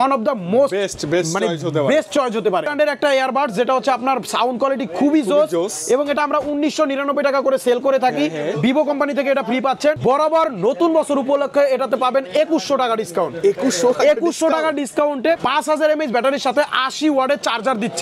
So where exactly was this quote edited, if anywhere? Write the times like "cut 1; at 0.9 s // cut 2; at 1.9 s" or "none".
cut 1; at 2.7 s // cut 2; at 10.0 s // cut 3; at 15.4 s